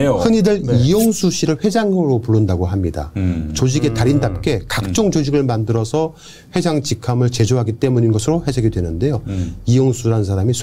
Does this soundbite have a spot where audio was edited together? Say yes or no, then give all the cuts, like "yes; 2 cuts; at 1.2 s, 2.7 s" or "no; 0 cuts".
no; 0 cuts